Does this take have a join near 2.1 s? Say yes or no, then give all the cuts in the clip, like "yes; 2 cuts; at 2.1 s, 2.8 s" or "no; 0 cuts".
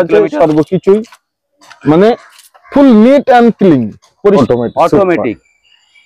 no; 1 cut; at 4.4 s